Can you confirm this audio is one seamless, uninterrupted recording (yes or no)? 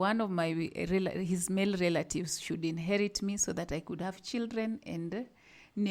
yes